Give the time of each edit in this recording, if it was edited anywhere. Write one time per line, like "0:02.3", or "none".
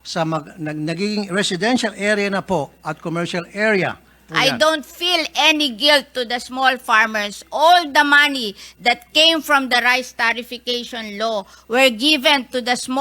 0:04.2